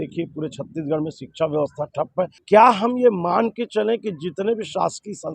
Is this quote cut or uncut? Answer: cut